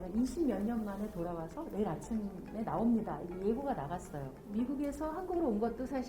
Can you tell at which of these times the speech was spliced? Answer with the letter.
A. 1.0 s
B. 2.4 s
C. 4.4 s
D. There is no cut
C